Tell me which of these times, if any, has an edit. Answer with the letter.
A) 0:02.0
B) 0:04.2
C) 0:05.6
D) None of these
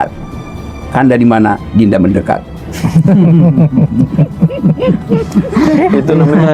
D